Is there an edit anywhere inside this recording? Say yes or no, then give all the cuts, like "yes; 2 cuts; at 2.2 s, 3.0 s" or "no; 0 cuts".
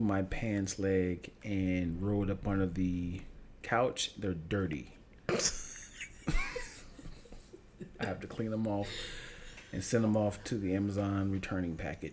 no; 0 cuts